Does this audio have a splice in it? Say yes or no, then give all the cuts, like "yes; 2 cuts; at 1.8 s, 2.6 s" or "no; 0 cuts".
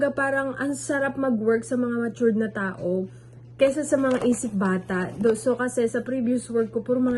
no; 0 cuts